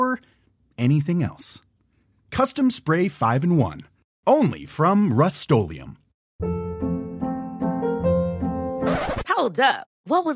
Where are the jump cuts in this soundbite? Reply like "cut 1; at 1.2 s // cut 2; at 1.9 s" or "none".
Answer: cut 1; at 6.3 s